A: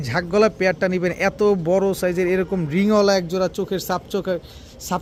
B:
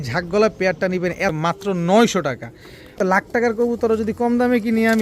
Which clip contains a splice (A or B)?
B